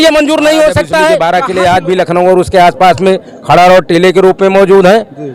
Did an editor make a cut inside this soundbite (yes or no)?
yes